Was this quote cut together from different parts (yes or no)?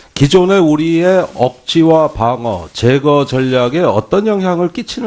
yes